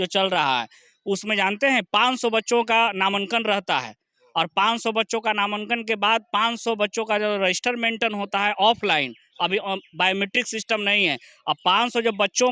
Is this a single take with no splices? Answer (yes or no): yes